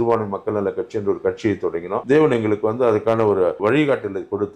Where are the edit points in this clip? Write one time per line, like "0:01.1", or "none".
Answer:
0:02.0
0:03.6